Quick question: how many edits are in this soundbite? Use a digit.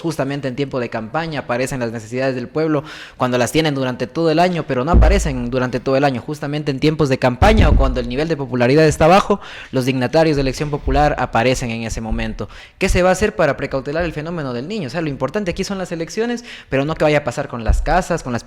1